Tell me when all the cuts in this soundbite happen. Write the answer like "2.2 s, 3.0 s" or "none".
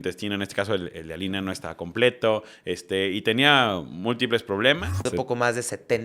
5.1 s